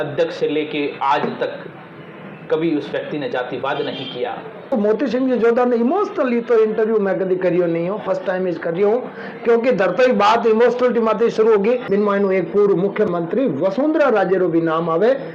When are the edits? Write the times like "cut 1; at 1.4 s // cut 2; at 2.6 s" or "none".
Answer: cut 1; at 4.7 s // cut 2; at 12.1 s